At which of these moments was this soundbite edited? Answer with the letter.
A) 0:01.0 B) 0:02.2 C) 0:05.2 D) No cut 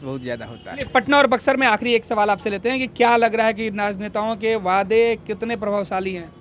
D